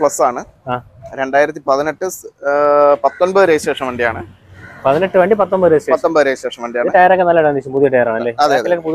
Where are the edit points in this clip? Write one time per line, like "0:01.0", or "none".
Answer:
none

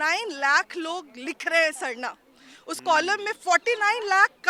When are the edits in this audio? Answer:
none

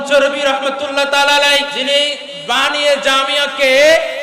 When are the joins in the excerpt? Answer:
0:01.7

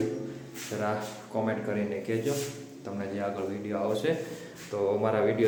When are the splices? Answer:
none

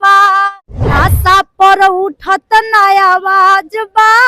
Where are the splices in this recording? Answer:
0:00.9

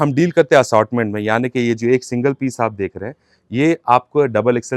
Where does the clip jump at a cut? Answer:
none

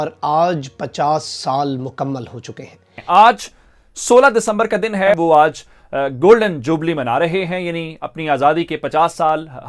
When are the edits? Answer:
0:02.8
0:05.1

